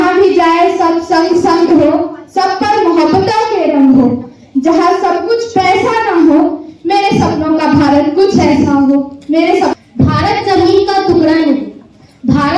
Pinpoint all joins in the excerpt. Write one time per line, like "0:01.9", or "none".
0:09.7